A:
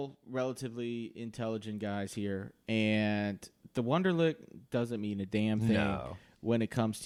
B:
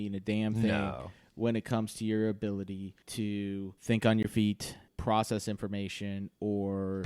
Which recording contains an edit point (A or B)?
B